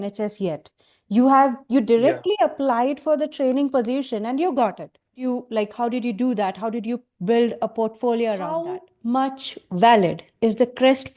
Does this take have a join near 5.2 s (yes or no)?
yes